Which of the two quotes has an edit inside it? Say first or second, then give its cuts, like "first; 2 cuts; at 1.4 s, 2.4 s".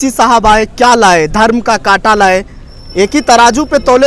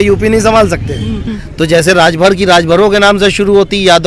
second; 1 cut; at 1.4 s